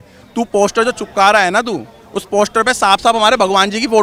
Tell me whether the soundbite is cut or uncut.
uncut